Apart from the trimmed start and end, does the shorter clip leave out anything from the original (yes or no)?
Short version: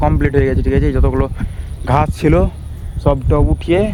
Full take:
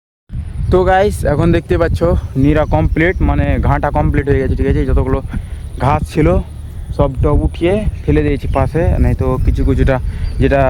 no